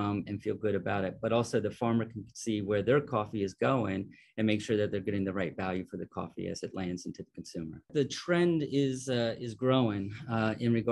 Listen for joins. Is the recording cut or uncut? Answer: cut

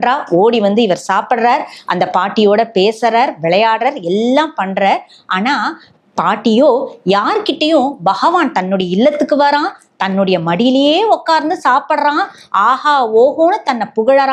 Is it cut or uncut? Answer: uncut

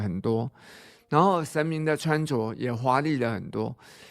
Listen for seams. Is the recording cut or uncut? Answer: uncut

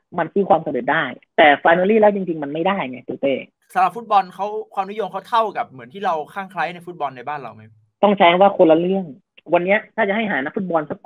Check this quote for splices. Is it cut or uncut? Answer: cut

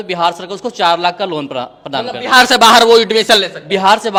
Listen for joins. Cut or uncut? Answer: uncut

